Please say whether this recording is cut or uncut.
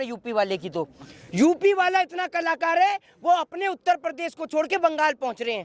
uncut